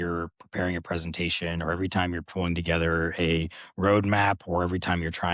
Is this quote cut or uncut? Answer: uncut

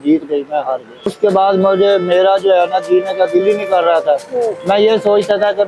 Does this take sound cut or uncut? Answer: cut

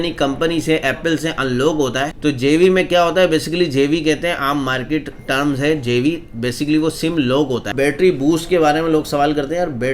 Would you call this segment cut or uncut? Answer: cut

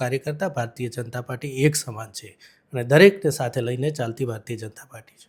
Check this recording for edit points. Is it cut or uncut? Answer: uncut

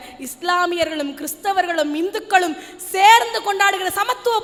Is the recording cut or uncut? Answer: uncut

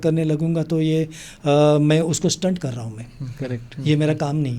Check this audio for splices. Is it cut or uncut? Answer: uncut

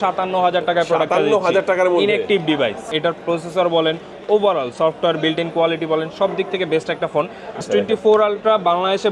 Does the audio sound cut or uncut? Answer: cut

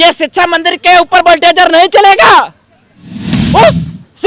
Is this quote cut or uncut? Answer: cut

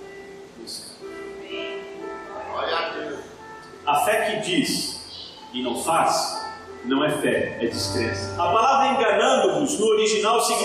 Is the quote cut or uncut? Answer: cut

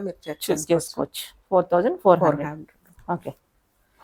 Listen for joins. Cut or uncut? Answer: uncut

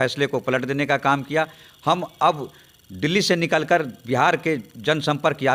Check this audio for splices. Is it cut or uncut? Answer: uncut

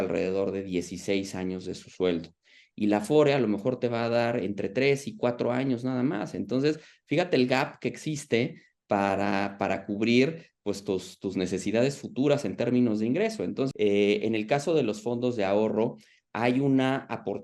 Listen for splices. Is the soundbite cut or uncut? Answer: cut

